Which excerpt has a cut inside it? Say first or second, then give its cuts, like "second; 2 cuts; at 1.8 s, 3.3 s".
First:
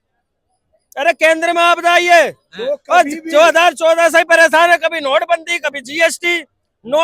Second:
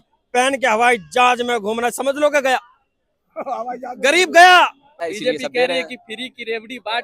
second; 1 cut; at 5.0 s